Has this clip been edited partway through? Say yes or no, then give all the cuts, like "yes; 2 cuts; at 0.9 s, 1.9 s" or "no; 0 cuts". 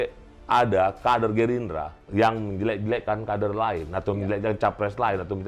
yes; 1 cut; at 2.0 s